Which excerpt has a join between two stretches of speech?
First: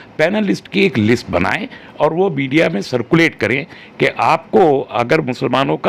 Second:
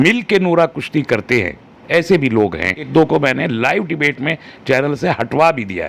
second; 1 cut; at 2.9 s

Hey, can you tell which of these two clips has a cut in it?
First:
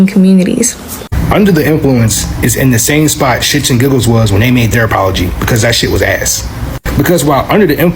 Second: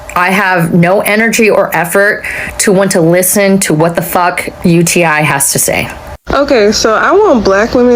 second; 1 cut; at 6.2 s

